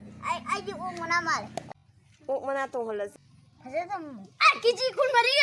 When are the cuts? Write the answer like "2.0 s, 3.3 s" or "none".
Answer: 1.7 s, 3.2 s